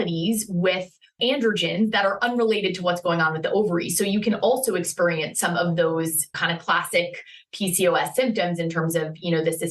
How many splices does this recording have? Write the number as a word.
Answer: one